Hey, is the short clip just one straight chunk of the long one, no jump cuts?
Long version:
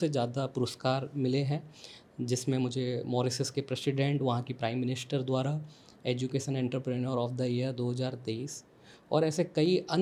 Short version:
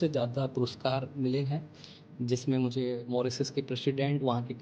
yes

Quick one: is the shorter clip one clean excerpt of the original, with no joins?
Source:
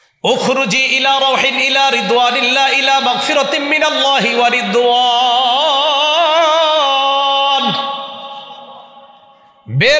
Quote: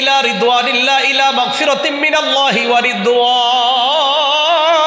yes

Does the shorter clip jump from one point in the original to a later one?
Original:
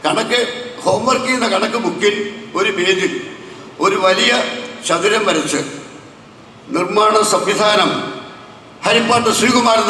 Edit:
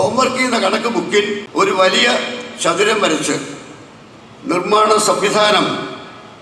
yes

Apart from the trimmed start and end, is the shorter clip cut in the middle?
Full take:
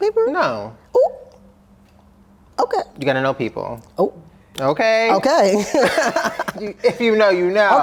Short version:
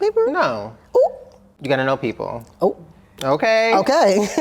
yes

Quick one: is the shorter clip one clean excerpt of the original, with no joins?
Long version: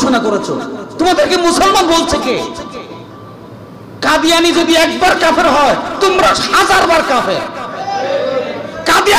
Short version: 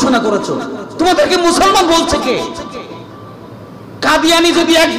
yes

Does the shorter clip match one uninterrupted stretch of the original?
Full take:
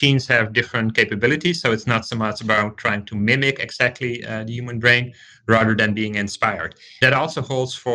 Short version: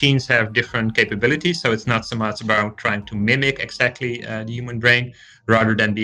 yes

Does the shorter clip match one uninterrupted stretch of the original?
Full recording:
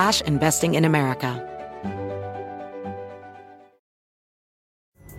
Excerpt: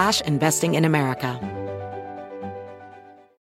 no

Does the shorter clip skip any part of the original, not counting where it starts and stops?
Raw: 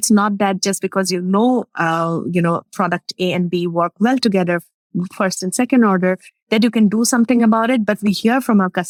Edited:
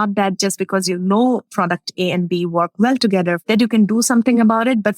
yes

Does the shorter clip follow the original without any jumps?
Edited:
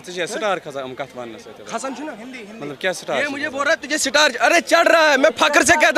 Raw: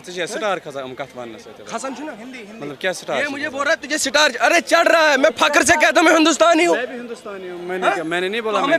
yes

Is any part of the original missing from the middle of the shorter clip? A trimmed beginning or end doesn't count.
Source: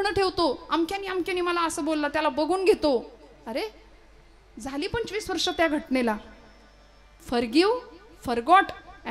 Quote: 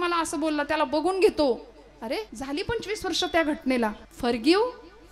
yes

